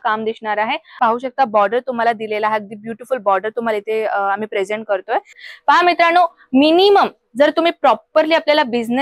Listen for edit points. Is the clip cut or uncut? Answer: cut